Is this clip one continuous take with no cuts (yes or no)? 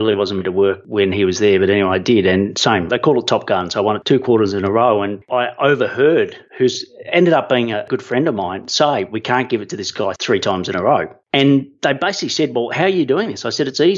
no